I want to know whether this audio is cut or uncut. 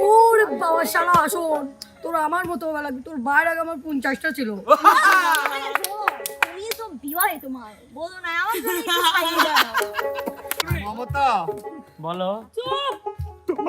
cut